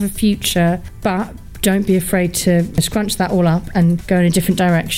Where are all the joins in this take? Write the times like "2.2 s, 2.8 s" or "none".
0.9 s, 2.8 s, 4.0 s

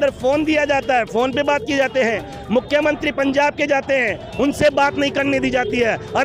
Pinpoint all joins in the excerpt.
none

